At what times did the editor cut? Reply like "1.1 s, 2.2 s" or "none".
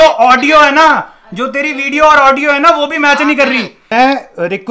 3.8 s